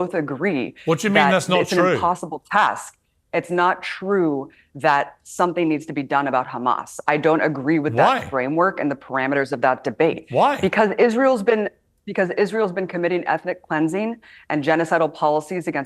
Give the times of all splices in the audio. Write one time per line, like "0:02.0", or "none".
none